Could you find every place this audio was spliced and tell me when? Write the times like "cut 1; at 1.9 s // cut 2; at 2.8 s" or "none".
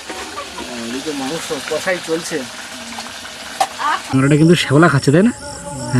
cut 1; at 4.1 s